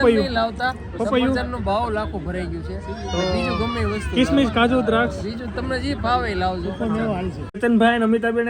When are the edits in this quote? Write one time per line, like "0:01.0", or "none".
0:07.4